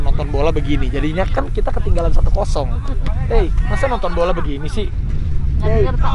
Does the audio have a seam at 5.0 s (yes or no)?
no